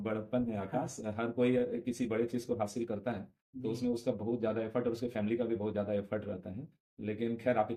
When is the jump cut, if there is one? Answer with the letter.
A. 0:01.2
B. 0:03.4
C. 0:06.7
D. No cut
D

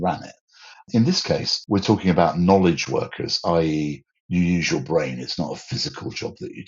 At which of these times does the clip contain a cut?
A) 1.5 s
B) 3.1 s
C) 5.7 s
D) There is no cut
A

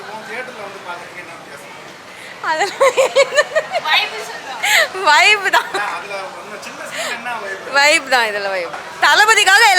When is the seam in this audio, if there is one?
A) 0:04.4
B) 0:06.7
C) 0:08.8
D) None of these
C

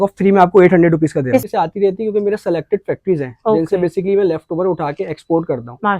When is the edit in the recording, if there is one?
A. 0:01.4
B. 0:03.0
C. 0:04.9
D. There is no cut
A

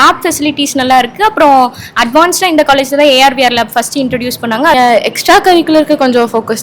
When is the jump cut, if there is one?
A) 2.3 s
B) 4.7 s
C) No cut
B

